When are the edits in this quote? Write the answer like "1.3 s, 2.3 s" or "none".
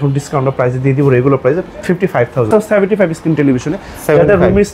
2.5 s